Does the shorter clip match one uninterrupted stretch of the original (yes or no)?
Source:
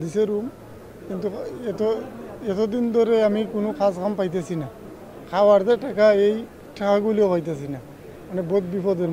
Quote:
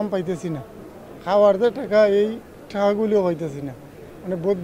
yes